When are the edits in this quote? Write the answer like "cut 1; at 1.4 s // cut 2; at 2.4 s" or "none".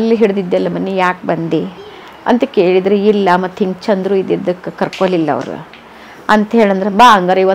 none